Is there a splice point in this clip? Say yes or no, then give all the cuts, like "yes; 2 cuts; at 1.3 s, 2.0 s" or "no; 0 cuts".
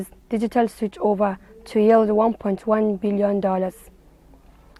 no; 0 cuts